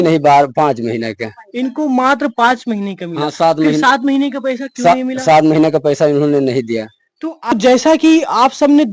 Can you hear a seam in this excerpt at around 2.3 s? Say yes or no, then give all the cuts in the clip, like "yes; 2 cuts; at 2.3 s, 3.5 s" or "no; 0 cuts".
no; 1 cut; at 7.5 s